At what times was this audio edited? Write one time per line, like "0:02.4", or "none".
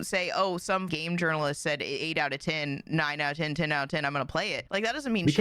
0:00.9
0:04.6